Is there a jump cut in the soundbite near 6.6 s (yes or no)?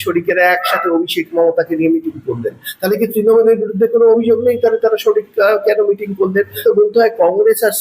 yes